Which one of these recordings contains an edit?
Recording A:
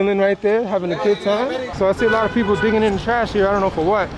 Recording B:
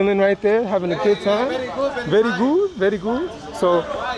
A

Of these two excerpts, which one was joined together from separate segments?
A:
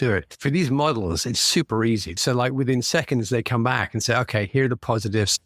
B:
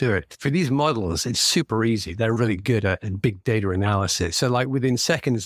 A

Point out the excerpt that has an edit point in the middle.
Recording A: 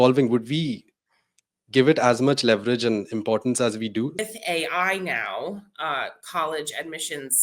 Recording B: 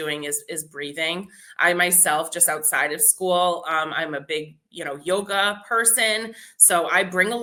A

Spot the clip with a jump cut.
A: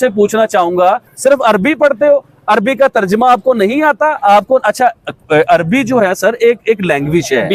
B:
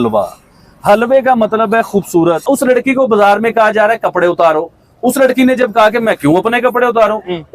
B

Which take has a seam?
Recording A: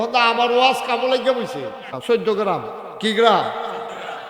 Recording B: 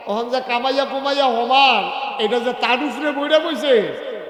A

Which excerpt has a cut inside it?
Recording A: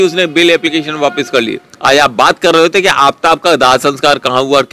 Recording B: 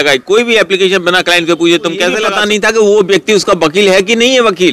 B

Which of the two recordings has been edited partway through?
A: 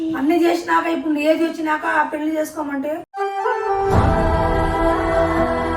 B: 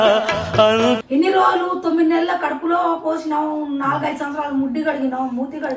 B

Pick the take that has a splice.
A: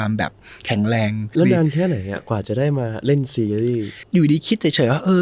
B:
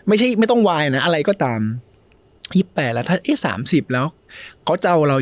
A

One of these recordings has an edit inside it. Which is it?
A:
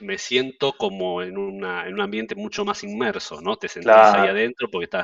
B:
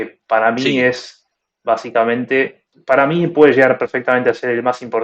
B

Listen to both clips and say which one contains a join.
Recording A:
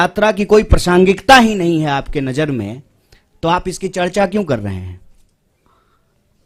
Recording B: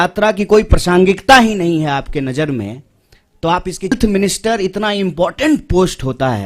B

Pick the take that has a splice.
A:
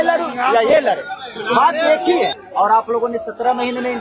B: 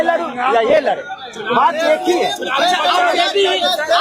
A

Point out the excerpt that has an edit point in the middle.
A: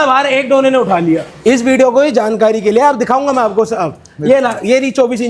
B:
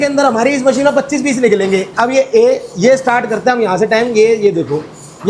A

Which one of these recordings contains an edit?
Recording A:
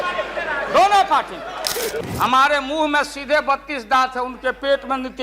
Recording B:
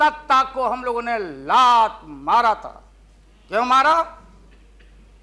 A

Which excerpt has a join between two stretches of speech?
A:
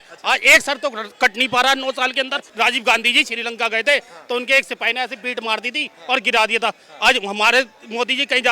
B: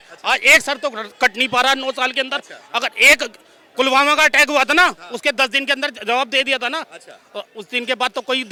A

